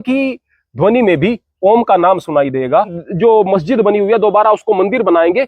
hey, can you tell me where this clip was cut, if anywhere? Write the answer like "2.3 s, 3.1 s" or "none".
3.0 s